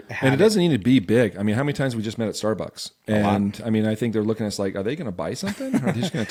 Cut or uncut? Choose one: uncut